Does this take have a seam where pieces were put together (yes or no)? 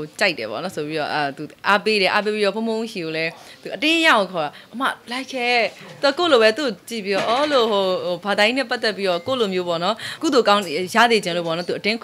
yes